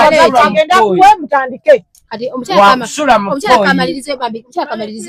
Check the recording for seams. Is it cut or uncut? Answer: uncut